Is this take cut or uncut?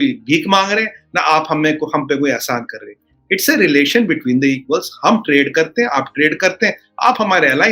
uncut